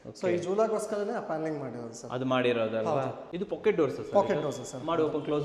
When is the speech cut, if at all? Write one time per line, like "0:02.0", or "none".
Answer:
0:03.2

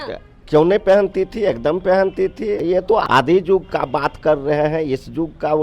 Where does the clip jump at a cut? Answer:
0:02.8

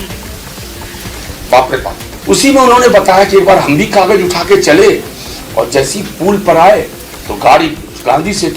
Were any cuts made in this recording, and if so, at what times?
0:02.1

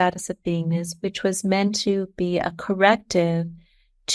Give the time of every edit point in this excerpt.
none

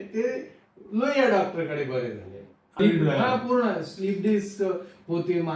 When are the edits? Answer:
0:02.8

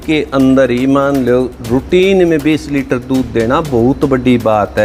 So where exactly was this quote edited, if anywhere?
none

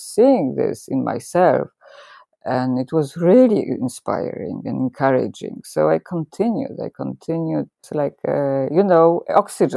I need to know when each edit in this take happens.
0:07.9

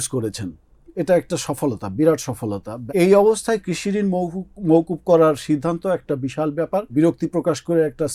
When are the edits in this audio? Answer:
0:02.8
0:06.9

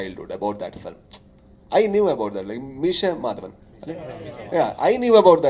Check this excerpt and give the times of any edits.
none

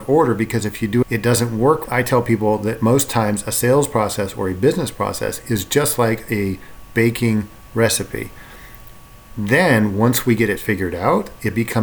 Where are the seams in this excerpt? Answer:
0:01.0
0:01.8

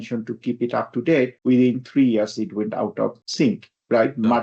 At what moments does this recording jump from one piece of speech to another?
none

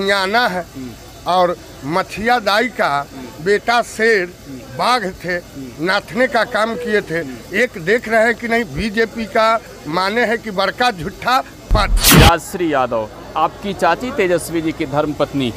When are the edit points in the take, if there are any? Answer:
0:12.0

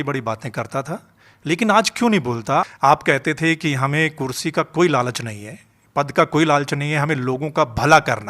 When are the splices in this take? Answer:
0:02.7

